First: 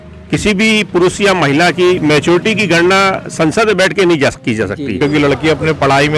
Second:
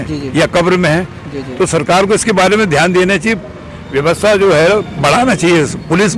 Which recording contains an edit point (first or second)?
first